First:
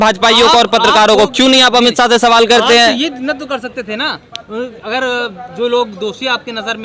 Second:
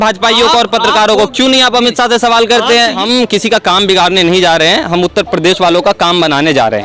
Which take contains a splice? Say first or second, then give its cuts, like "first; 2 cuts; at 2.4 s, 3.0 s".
second; 1 cut; at 3.0 s